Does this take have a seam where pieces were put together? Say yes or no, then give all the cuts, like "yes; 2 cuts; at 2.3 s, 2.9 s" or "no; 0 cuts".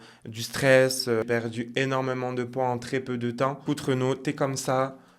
yes; 2 cuts; at 1.2 s, 3.6 s